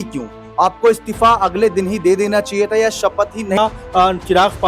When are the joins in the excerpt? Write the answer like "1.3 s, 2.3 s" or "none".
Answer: 3.6 s